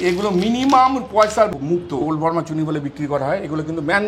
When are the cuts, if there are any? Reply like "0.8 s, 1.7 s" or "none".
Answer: 2.0 s